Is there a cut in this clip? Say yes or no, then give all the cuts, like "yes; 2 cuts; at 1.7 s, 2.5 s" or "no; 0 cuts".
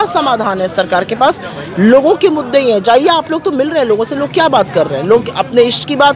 no; 0 cuts